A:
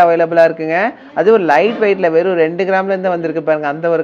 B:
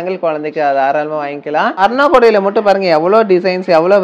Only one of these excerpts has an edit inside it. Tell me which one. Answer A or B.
B